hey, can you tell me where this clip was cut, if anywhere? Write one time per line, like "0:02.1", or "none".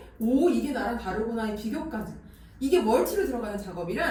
none